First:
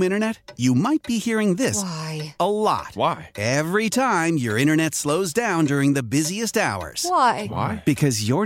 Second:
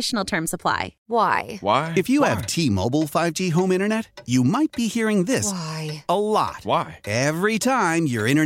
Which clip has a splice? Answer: second; 1 cut; at 0.9 s

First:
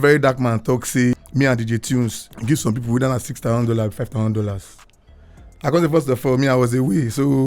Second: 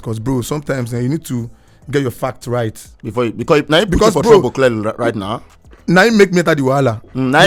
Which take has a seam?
first; 2 cuts; at 1.1 s, 2.3 s

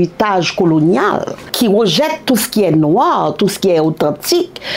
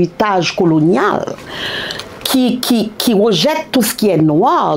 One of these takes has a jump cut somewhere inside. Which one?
first; 1 cut; at 1.5 s

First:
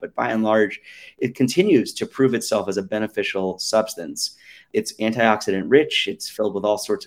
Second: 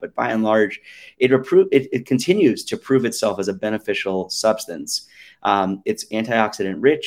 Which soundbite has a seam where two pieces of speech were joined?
first; 2 cuts; at 1.1 s, 4.7 s

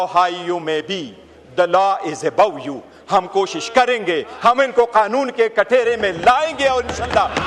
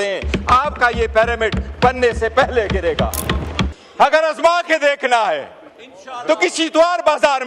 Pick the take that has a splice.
second; 1 cut; at 3.8 s

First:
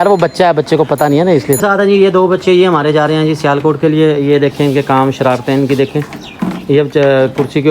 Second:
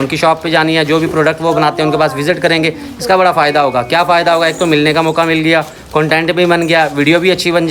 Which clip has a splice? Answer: first; 1 cut; at 1.6 s

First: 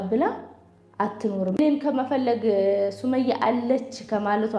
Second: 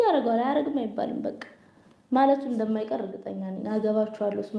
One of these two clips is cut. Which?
first; 1 cut; at 1.6 s

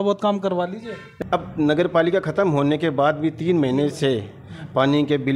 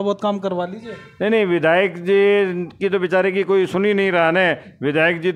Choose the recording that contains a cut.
first; 1 cut; at 1.0 s

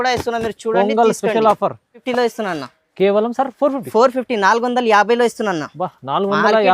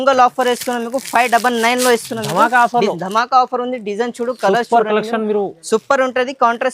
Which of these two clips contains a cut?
first; 1 cut; at 2.0 s

